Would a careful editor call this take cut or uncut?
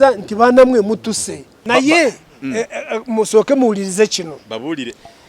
cut